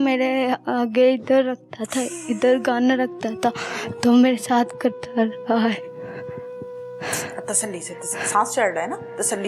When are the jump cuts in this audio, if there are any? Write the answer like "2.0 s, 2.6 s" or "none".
none